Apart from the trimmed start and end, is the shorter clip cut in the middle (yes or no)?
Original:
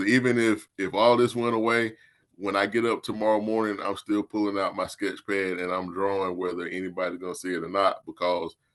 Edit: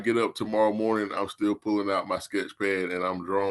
no